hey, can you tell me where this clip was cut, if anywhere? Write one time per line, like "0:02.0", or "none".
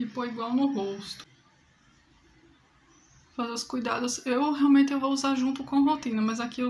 0:01.1